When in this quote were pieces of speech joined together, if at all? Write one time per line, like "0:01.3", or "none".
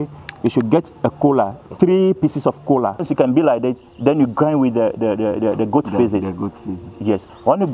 0:03.1